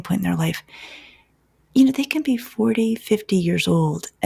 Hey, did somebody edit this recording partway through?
no; 0 cuts

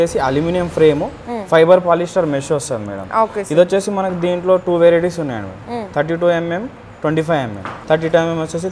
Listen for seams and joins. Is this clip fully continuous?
no; 1 cut; at 7.7 s

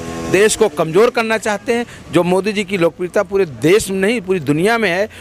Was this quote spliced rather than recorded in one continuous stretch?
no; 0 cuts

